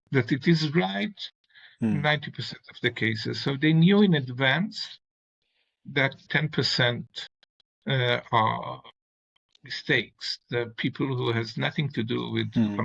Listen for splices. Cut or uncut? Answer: cut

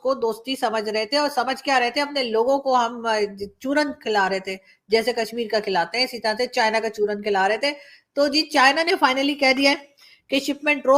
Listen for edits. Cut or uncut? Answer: uncut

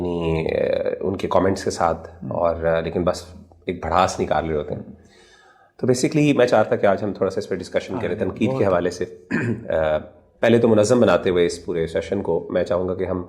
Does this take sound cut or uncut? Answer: uncut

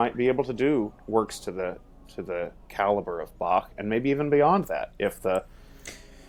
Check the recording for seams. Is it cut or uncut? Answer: uncut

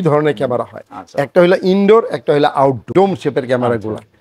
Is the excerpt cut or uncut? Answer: cut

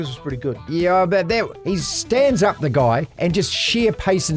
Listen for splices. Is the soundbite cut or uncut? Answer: cut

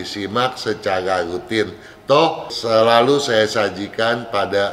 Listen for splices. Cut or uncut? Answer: cut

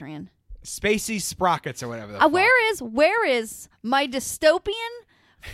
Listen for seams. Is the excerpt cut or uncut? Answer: uncut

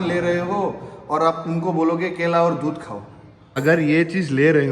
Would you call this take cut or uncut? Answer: cut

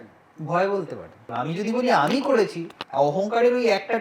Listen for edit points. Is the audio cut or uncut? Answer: cut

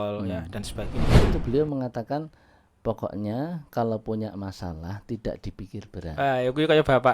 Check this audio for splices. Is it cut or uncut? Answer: cut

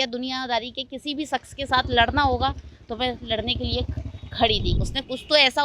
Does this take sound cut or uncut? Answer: cut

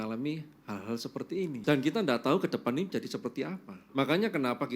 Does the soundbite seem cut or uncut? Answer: cut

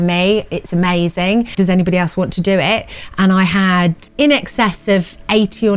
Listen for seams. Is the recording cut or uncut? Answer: cut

